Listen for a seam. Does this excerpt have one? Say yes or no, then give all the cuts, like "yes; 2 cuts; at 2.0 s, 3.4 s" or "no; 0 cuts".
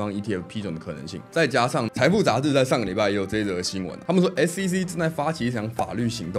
yes; 2 cuts; at 1.2 s, 1.9 s